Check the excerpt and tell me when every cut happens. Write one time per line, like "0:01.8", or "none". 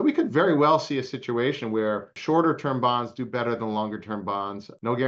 0:02.2